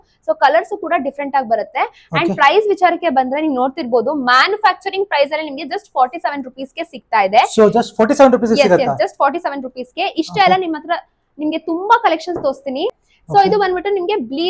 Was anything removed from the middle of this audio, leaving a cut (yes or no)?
no